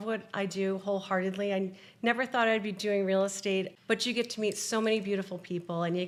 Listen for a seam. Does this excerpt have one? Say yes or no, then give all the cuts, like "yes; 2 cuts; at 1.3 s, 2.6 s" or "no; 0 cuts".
no; 0 cuts